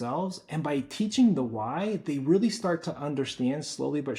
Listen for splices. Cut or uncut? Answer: uncut